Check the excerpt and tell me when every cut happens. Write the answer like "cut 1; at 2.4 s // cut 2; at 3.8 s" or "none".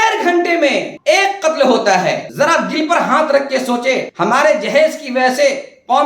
cut 1; at 0.9 s // cut 2; at 2.2 s // cut 3; at 4.1 s